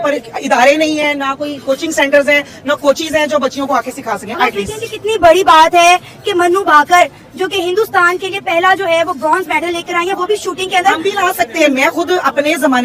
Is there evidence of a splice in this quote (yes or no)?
no